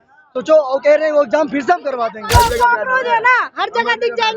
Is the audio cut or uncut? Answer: cut